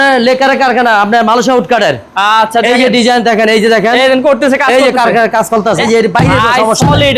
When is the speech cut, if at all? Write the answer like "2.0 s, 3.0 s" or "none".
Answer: none